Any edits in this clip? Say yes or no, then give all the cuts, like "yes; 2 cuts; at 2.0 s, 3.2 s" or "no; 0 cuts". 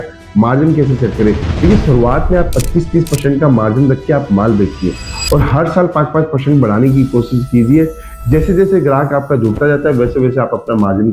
no; 0 cuts